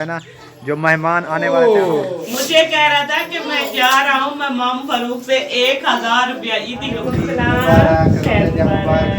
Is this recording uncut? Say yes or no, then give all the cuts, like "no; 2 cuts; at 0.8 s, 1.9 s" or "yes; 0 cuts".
no; 2 cuts; at 1.5 s, 7.0 s